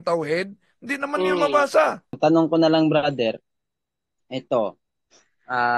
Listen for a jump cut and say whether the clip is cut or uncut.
cut